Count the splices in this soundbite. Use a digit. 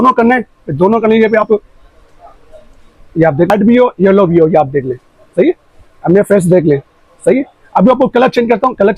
1